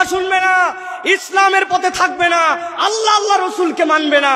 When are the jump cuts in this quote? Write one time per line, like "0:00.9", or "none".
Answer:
none

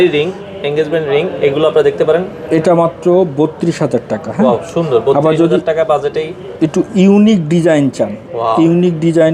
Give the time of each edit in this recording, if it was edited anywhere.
none

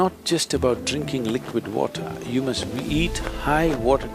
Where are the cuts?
none

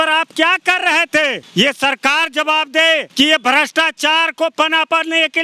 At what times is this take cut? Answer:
0:01.4
0:03.1

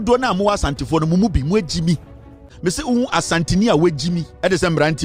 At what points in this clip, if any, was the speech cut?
0:02.5

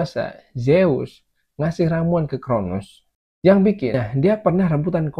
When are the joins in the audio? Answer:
0:03.9

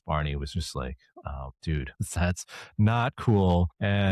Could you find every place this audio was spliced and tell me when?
0:01.5

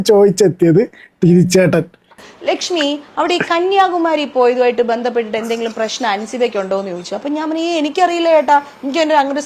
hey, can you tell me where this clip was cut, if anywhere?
0:02.3

